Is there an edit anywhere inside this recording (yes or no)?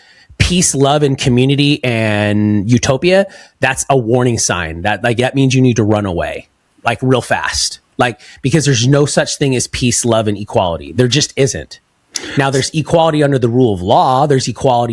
no